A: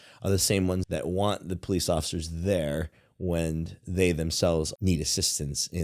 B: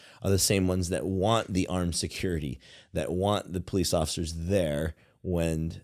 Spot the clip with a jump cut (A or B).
A